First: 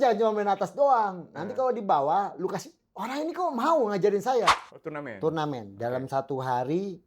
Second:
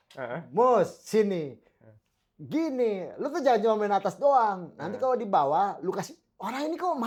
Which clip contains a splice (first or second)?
first